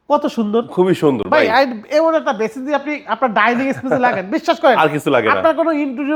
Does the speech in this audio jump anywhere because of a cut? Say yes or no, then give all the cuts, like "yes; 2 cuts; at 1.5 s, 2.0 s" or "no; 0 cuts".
no; 0 cuts